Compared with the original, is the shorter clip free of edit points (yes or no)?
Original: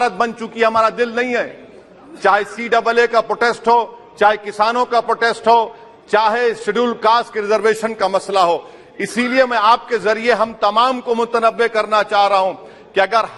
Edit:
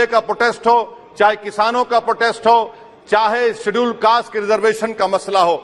yes